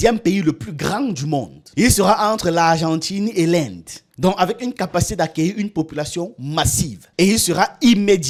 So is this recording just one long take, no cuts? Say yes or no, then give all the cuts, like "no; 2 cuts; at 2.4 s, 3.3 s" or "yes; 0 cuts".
yes; 0 cuts